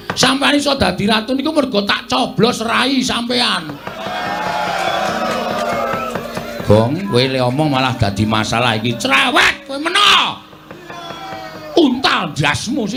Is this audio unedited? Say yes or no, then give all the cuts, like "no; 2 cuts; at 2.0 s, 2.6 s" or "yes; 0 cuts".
yes; 0 cuts